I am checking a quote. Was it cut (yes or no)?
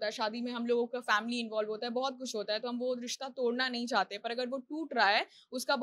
no